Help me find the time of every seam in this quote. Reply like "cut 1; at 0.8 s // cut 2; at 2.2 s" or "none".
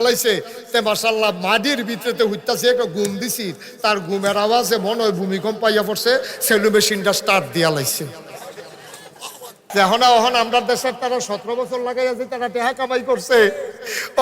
cut 1; at 9.6 s